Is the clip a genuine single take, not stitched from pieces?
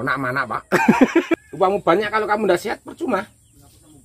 no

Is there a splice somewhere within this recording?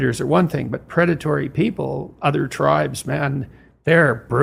no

